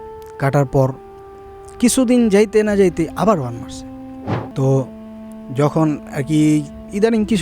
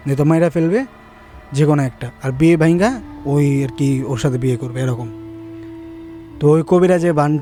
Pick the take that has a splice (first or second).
first